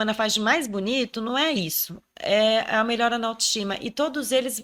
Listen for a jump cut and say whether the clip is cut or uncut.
uncut